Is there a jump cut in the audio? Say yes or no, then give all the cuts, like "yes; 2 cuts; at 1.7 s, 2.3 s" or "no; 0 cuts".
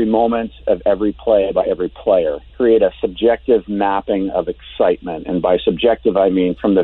yes; 1 cut; at 2.4 s